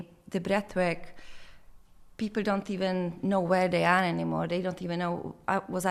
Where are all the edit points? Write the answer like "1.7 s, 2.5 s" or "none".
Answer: none